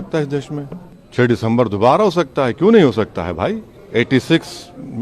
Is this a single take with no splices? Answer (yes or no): yes